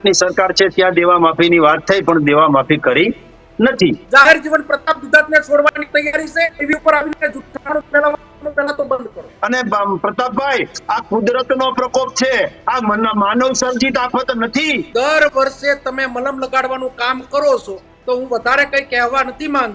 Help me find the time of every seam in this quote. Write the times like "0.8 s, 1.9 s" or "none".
4.0 s, 9.3 s, 14.8 s